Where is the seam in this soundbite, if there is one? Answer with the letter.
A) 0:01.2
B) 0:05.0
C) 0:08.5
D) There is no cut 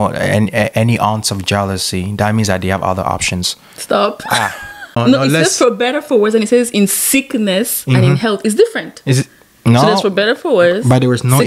B